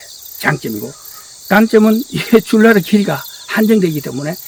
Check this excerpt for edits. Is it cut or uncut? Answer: uncut